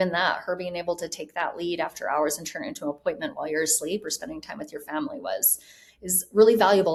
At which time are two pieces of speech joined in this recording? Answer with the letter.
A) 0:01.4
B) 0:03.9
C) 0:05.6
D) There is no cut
D